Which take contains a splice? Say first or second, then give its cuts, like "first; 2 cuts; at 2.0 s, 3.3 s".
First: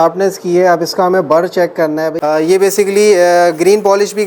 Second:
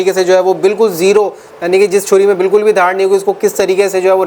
first; 1 cut; at 2.1 s